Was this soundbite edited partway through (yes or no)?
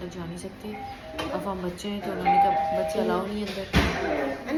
no